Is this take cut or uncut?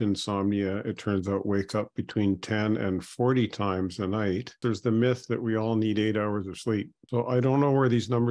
cut